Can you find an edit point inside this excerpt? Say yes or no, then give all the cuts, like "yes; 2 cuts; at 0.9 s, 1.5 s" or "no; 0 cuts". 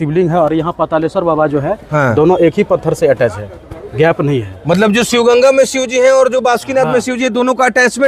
no; 0 cuts